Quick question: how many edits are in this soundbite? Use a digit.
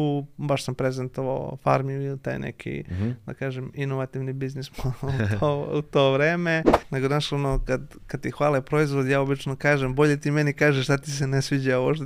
1